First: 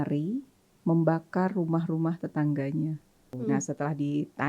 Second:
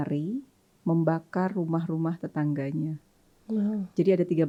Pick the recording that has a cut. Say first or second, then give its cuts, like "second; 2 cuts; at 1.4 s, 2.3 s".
first; 1 cut; at 3.3 s